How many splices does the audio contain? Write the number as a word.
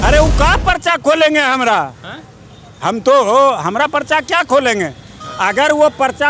zero